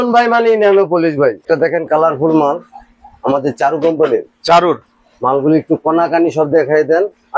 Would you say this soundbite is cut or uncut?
cut